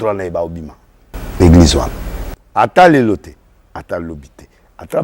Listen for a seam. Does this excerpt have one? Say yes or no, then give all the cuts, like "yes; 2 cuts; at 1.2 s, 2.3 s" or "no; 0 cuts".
no; 0 cuts